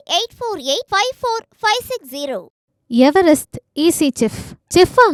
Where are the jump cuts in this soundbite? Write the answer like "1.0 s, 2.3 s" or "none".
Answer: none